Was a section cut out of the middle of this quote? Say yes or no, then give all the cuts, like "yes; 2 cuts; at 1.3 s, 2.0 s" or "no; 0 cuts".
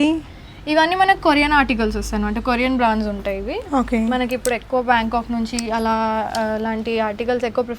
no; 0 cuts